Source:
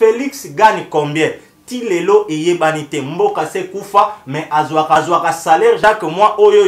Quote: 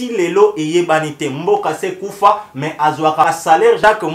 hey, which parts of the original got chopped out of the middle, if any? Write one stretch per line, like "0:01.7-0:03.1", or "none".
0:05.0-0:05.2